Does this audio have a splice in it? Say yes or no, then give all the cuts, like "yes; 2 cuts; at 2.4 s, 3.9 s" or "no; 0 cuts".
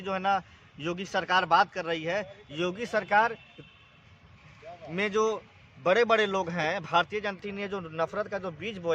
yes; 1 cut; at 7.4 s